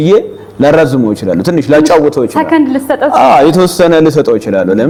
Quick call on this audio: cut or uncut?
uncut